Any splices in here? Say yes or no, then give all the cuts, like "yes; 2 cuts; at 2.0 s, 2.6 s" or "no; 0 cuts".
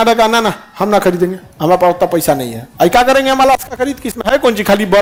no; 0 cuts